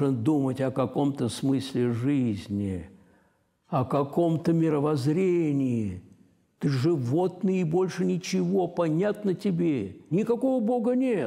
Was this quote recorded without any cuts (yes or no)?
no